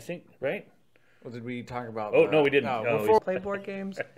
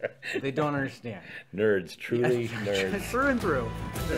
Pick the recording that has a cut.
first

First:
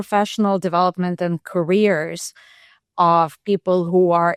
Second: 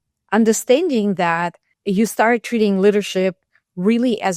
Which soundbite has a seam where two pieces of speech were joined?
second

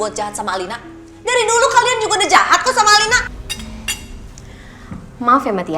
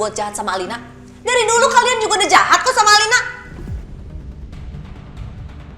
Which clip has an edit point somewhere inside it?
first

